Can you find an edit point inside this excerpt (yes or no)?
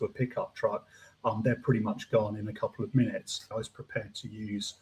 yes